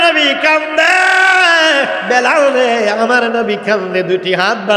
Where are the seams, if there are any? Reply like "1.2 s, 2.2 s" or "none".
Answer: 2.0 s